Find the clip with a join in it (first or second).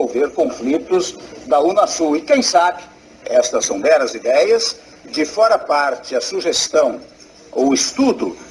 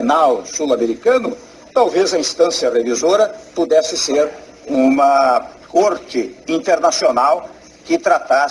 second